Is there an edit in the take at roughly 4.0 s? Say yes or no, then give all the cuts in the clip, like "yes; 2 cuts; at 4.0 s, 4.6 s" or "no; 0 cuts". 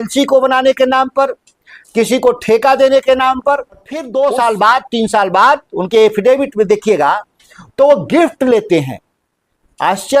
yes; 1 cut; at 4.0 s